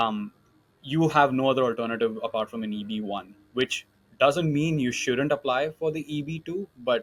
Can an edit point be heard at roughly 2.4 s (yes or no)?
no